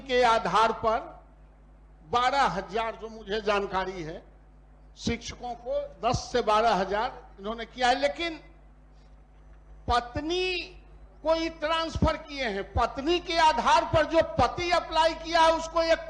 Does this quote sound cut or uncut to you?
uncut